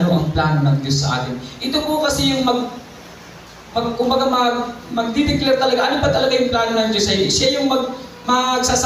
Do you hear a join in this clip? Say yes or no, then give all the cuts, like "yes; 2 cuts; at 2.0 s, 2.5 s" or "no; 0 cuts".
no; 0 cuts